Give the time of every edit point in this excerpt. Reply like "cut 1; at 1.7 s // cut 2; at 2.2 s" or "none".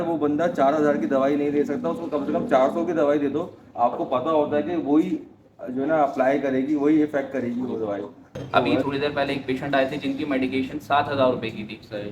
cut 1; at 8.4 s